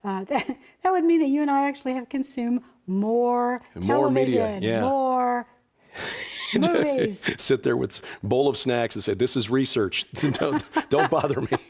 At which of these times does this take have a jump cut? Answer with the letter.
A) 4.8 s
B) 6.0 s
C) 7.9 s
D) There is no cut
A